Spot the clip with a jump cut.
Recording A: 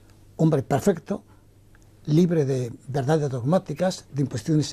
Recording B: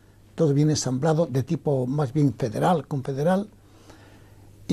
B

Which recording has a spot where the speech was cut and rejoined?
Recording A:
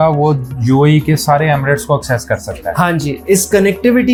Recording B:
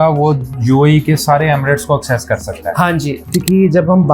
B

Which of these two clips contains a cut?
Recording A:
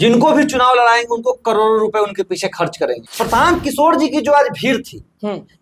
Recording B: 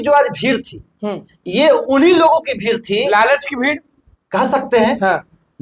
A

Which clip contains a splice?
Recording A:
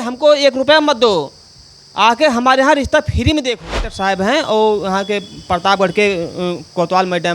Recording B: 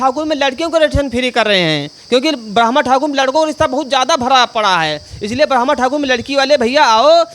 A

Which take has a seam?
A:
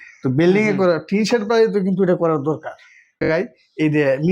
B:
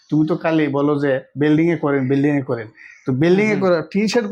A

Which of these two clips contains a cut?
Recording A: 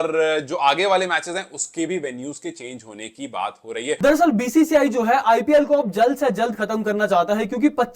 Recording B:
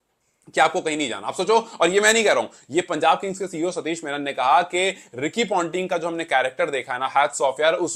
A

